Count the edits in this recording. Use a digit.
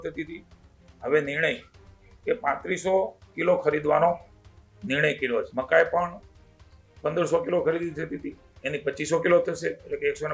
1